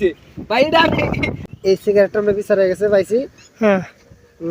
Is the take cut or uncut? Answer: cut